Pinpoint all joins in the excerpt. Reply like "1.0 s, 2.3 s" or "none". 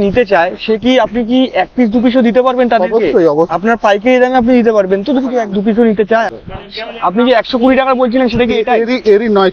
3.5 s, 6.3 s